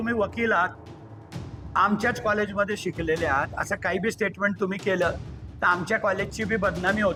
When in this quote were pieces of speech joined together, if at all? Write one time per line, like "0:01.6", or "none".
none